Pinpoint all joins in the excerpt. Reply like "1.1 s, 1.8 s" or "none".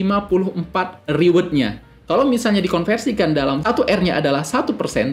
3.6 s